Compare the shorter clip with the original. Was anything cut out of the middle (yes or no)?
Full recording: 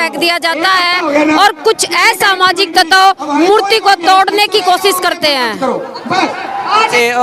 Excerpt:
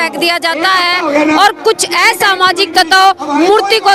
no